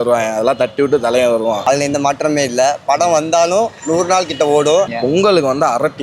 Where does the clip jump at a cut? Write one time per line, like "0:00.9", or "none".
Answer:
0:01.7
0:04.9